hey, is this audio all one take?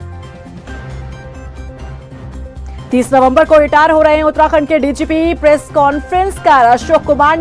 no; 1 cut; at 1.0 s

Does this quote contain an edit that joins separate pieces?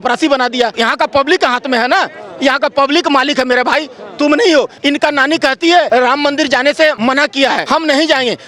yes; 4 cuts; at 0.8 s, 4.7 s, 5.9 s, 7.3 s

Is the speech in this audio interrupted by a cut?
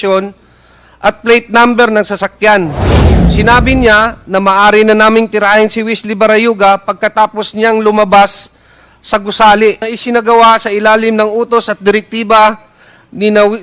yes; 1 cut; at 9.9 s

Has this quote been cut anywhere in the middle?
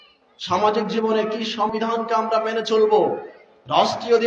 yes; 1 cut; at 1.7 s

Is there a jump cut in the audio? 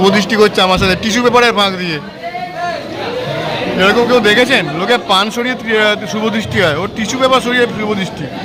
no; 0 cuts

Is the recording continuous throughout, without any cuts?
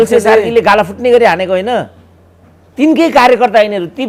yes; 0 cuts

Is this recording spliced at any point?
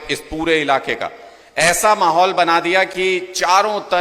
no; 0 cuts

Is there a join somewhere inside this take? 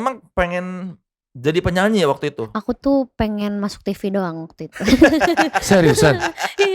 yes; 1 cut; at 2.5 s

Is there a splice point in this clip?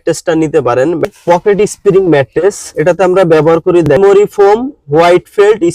yes; 3 cuts; at 1.1 s, 2.7 s, 3.9 s

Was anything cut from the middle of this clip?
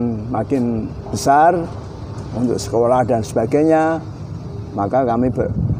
no; 0 cuts

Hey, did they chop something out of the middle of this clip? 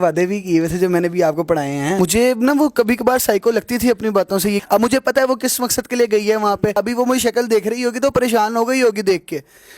yes; 3 cuts; at 2.0 s, 4.6 s, 6.8 s

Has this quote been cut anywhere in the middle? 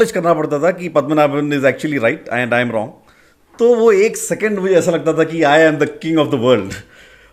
no; 0 cuts

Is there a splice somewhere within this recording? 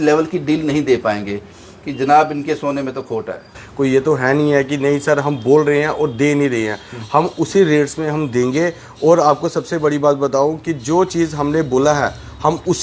yes; 1 cut; at 3.6 s

